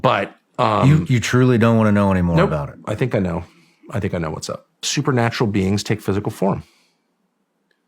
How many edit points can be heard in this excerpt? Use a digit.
1